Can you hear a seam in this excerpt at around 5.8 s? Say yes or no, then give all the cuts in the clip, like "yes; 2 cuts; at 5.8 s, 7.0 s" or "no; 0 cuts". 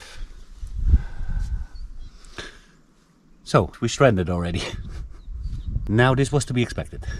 yes; 2 cuts; at 3.7 s, 5.8 s